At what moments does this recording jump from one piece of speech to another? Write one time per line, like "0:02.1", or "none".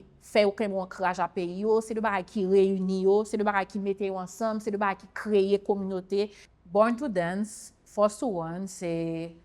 0:06.4